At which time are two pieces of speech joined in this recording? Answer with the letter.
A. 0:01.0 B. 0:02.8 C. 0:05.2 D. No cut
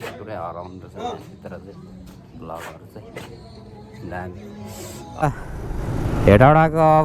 C